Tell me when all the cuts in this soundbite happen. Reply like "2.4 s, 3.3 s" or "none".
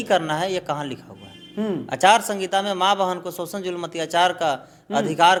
none